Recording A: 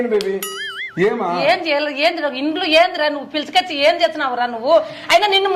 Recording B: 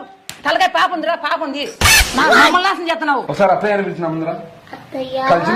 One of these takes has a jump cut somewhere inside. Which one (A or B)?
B